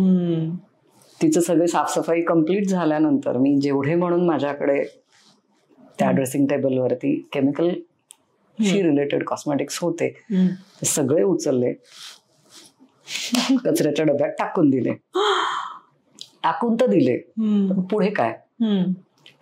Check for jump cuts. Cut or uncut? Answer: uncut